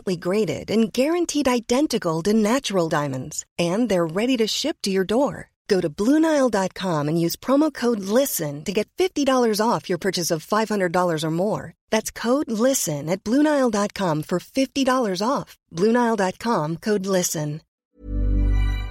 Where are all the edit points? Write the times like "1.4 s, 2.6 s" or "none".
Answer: 17.7 s